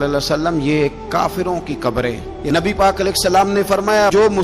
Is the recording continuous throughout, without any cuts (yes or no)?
no